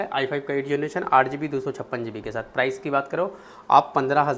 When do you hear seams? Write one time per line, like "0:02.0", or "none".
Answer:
none